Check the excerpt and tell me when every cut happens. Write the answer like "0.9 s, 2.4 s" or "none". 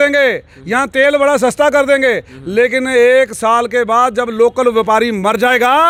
none